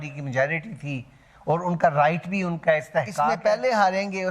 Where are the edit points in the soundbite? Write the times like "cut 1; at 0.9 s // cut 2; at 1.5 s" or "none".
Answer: cut 1; at 3.3 s